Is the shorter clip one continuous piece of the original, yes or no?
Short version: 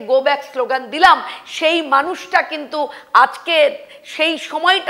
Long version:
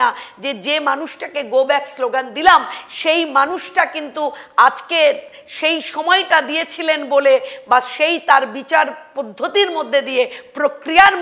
yes